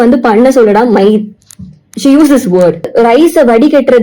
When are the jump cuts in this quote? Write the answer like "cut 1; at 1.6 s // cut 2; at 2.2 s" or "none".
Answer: cut 1; at 2.9 s